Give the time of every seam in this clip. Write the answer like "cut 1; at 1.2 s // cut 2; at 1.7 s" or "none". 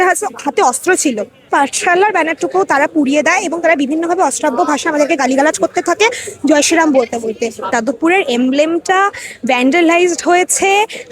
cut 1; at 1.5 s // cut 2; at 7.7 s